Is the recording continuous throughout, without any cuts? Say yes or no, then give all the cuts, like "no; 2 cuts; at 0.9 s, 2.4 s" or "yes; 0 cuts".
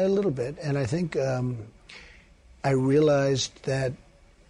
yes; 0 cuts